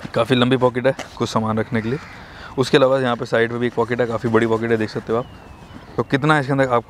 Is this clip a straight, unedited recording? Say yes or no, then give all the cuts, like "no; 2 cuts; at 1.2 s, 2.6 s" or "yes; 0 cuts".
no; 1 cut; at 5.9 s